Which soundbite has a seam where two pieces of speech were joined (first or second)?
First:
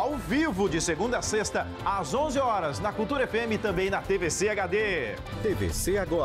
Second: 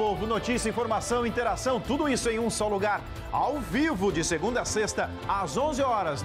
first